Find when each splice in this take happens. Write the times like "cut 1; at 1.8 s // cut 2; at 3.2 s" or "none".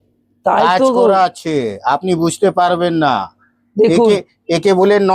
none